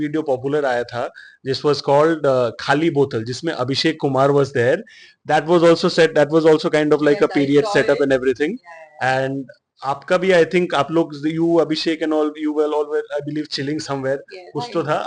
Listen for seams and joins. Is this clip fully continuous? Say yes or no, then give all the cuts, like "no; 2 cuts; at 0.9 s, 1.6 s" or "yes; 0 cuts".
yes; 0 cuts